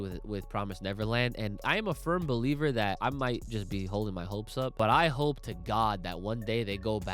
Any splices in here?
yes; 3 cuts; at 1.6 s, 3.0 s, 4.7 s

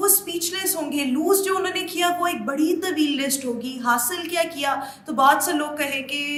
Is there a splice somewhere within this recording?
no; 0 cuts

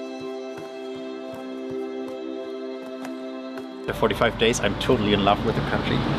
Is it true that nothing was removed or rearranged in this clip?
no; 1 cut; at 3.9 s

